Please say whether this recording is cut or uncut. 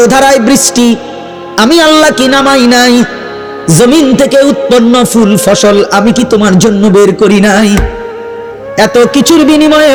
uncut